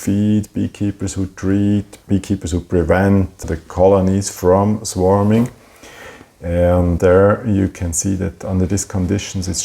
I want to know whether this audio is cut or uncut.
cut